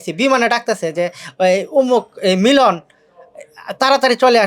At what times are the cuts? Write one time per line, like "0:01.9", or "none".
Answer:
none